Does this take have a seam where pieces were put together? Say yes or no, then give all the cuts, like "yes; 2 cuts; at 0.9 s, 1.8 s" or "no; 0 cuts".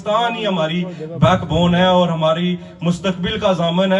no; 0 cuts